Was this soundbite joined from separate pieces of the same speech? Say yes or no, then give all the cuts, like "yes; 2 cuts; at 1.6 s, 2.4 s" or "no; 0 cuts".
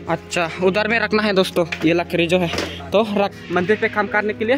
yes; 1 cut; at 3.3 s